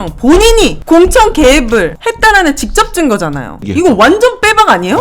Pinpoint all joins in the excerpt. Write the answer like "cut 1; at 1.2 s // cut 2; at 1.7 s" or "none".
cut 1; at 3.6 s